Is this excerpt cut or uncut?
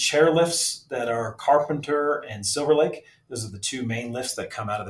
uncut